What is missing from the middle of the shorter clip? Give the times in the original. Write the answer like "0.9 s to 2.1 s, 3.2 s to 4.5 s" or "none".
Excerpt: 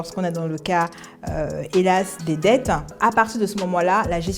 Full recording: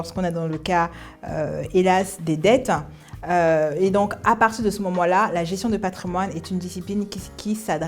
2.9 s to 4.2 s